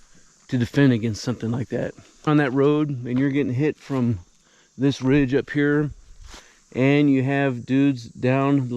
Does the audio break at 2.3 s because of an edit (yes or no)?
yes